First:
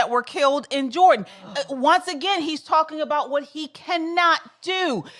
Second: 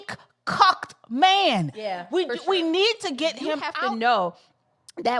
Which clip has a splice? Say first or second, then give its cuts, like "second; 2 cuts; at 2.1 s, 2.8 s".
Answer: second; 1 cut; at 3.7 s